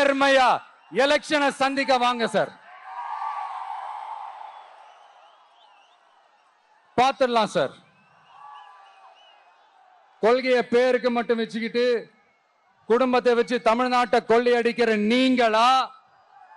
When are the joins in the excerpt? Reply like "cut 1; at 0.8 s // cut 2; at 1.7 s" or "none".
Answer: none